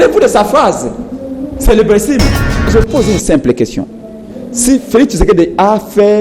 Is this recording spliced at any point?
yes; 1 cut; at 2.7 s

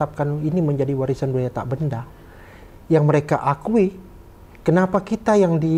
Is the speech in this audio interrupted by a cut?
no; 0 cuts

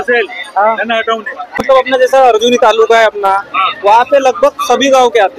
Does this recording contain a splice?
yes; 1 cut; at 1.6 s

